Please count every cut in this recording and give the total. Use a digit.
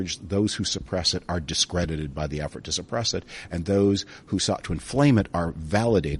0